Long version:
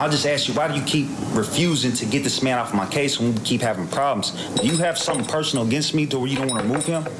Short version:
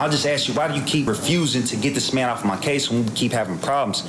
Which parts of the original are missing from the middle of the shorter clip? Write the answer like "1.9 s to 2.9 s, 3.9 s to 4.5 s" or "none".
1.1 s to 1.4 s